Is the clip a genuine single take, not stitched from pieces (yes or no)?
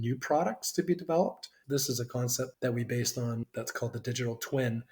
no